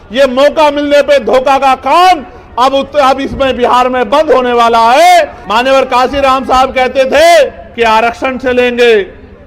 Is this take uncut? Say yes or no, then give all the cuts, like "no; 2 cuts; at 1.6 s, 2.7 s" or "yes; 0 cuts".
no; 2 cuts; at 5.4 s, 7.6 s